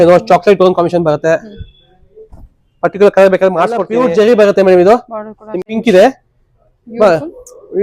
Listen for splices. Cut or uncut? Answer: cut